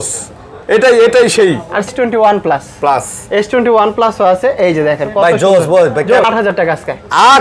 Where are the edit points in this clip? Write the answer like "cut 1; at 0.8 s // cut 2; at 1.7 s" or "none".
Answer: cut 1; at 1.9 s // cut 2; at 6.2 s